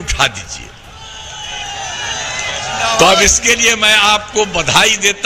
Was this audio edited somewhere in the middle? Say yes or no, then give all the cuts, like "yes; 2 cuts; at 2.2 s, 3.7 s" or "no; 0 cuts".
no; 0 cuts